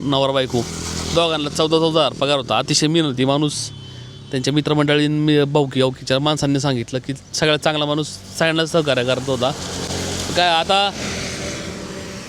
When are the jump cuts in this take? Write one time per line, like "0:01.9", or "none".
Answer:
none